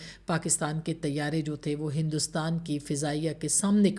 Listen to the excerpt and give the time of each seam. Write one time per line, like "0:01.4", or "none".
none